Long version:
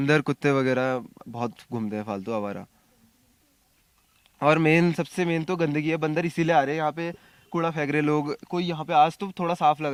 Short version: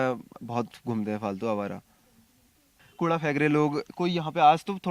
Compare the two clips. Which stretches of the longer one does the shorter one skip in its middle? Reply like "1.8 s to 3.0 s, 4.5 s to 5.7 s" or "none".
3.6 s to 7.3 s